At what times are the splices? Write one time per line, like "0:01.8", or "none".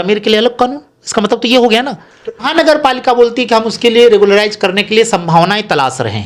0:02.5